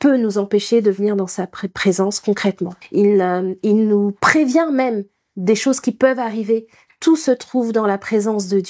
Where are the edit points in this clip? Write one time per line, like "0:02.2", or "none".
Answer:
0:02.7